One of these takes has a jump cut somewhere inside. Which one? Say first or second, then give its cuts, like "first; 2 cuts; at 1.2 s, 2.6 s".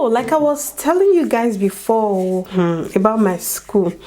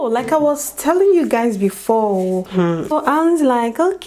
second; 1 cut; at 2.9 s